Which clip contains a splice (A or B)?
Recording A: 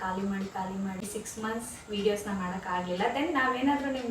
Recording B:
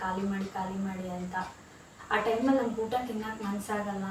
A